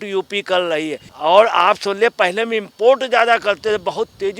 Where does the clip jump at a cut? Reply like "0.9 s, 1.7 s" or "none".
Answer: 1.0 s